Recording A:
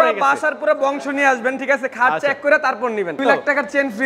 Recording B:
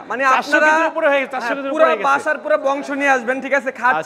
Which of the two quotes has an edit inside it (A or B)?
A